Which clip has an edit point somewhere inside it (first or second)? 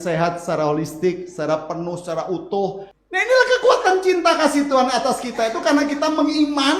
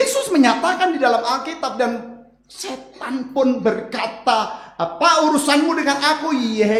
first